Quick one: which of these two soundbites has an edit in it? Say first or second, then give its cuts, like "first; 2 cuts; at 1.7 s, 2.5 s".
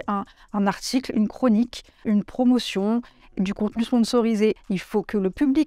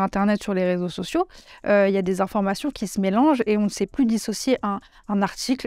first; 2 cuts; at 2.0 s, 4.6 s